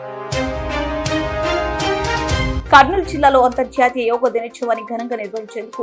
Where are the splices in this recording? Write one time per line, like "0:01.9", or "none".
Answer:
0:02.6